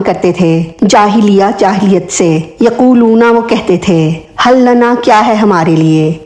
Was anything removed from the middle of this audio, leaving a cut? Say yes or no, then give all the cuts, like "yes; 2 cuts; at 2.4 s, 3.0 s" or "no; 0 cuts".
yes; 1 cut; at 2.5 s